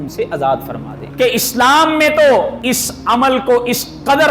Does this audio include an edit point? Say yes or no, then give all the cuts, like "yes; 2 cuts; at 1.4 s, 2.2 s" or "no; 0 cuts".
yes; 2 cuts; at 1.0 s, 2.6 s